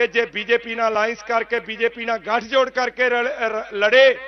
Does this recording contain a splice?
no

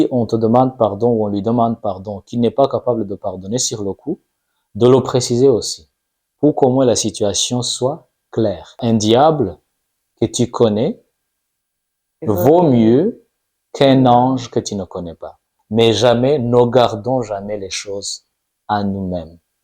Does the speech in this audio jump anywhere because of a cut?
yes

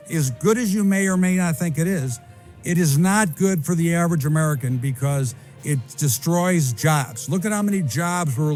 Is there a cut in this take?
no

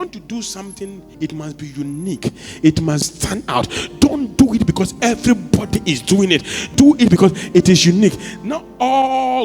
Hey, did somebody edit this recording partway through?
yes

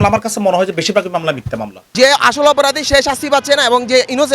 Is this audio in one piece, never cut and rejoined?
no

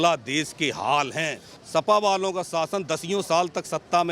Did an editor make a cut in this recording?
yes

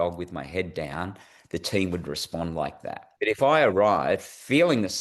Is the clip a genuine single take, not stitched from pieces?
no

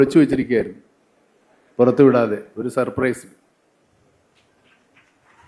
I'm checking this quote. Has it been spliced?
no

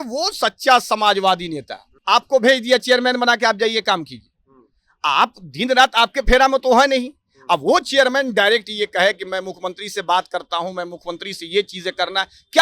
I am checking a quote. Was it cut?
yes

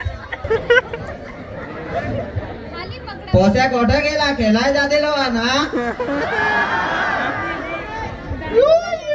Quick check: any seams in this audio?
yes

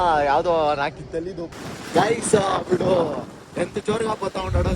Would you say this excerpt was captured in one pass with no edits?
no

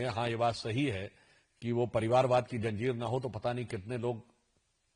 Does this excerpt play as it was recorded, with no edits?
yes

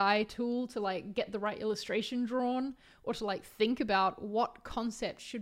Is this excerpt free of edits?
yes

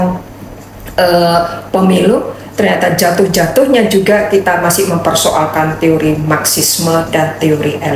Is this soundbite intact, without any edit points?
yes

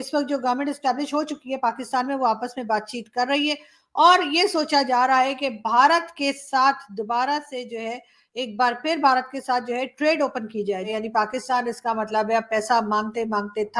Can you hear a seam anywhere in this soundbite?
yes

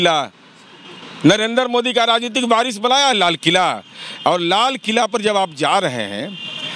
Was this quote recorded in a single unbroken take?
yes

